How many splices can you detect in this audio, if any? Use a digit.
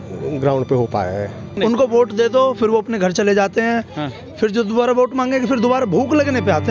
1